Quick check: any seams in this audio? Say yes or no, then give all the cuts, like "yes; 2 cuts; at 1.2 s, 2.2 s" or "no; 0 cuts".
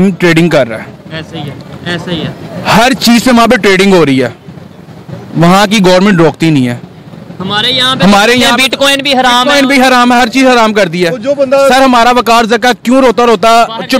no; 0 cuts